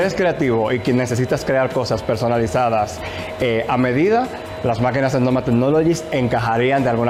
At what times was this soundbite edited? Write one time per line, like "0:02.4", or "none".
none